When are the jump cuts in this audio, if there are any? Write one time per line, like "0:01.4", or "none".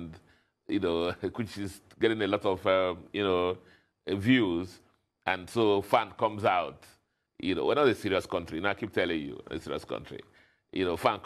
0:09.6